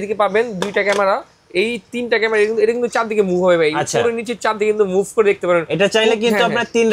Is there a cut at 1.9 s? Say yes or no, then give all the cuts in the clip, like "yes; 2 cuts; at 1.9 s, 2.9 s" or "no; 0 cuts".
no; 0 cuts